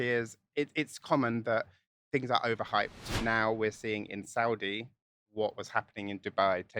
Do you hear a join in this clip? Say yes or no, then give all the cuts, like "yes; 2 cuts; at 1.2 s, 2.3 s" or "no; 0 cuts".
yes; 1 cut; at 3.0 s